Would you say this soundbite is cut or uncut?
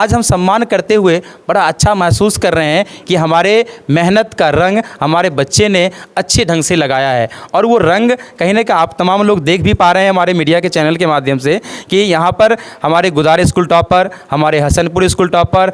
uncut